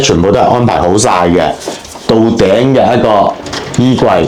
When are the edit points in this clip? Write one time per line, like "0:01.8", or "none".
none